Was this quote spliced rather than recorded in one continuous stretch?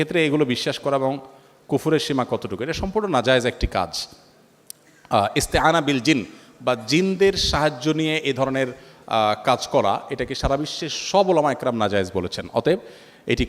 no; 0 cuts

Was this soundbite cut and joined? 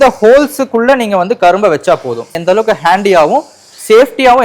yes; 1 cut; at 2.4 s

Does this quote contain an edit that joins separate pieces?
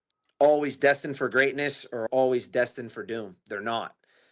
yes; 1 cut; at 2.0 s

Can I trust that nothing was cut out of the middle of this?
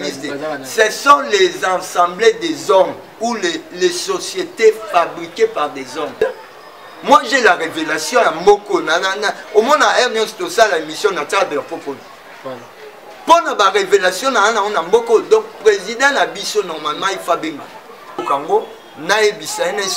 no; 2 cuts; at 6.1 s, 18.2 s

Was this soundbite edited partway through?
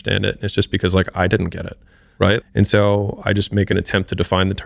yes; 2 cuts; at 2.4 s, 3.7 s

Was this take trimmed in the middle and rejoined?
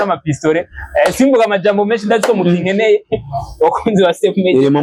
no; 0 cuts

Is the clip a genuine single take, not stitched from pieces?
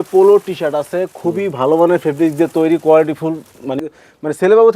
no; 1 cut; at 3.8 s

